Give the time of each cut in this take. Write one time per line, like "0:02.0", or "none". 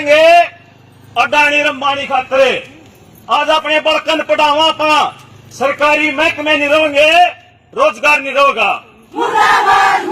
0:09.1